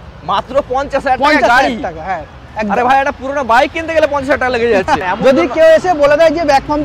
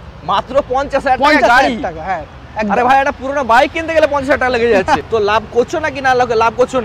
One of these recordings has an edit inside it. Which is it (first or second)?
first